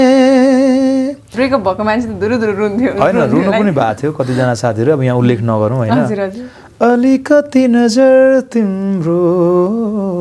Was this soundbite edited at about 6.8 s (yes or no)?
no